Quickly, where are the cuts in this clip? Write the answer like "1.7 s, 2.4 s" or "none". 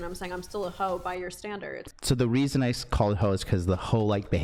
1.9 s